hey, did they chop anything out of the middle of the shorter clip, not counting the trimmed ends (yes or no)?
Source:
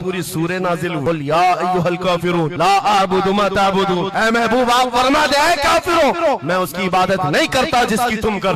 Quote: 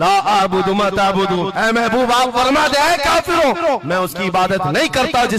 no